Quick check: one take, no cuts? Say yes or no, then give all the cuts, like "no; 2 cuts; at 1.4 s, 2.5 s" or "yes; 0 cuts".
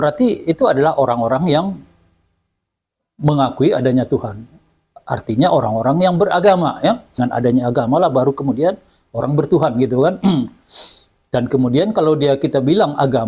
no; 1 cut; at 7.1 s